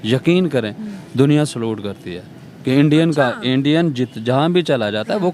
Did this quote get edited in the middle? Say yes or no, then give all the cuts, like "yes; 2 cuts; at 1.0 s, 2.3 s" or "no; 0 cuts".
no; 0 cuts